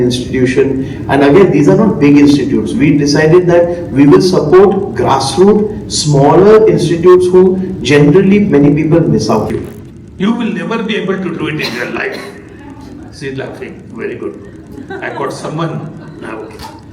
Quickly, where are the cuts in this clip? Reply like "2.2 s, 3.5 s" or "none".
9.6 s